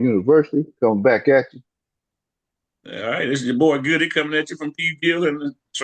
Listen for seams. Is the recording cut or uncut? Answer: uncut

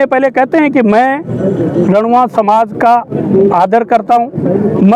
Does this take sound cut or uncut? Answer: uncut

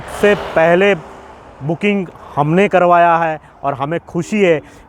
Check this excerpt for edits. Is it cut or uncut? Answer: uncut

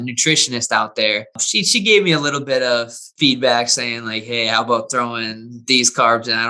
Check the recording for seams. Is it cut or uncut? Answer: cut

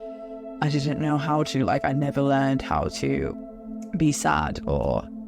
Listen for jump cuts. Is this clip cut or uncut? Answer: cut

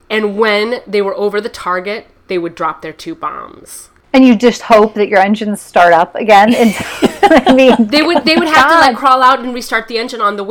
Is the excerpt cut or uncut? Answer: uncut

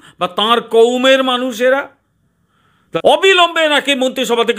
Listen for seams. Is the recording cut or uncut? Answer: cut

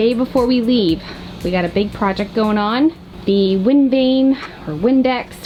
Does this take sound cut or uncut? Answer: uncut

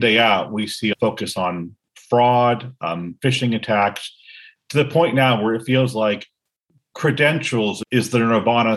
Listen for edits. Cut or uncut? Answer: cut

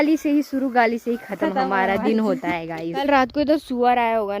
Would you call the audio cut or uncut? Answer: cut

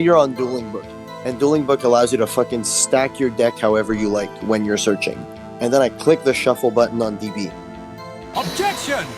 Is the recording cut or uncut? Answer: uncut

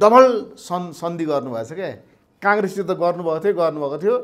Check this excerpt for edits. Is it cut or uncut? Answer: uncut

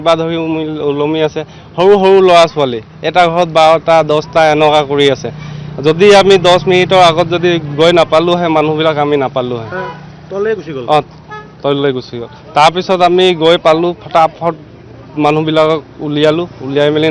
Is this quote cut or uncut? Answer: uncut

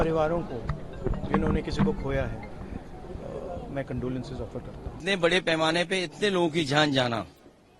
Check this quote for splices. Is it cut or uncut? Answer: cut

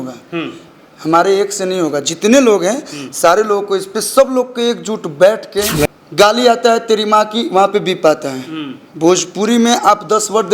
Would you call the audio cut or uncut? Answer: cut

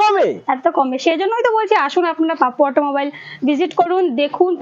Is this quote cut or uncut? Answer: uncut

